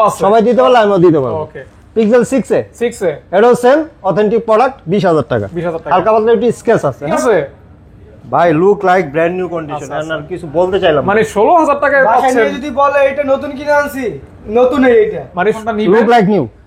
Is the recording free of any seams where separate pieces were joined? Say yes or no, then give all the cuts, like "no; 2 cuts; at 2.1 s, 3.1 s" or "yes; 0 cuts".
no; 2 cuts; at 7.2 s, 15.6 s